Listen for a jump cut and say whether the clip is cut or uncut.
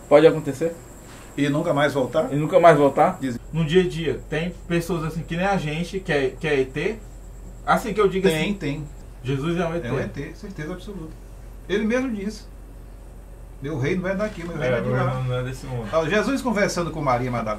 cut